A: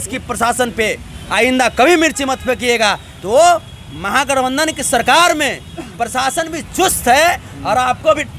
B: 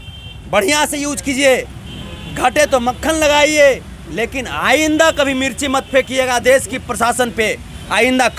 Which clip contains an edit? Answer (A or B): A